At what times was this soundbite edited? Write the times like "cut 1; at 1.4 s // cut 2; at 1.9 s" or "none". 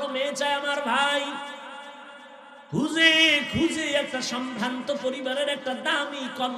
none